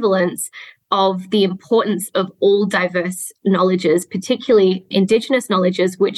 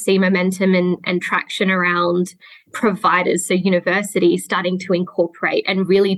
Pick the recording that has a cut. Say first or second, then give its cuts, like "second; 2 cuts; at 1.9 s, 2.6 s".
first; 1 cut; at 4.9 s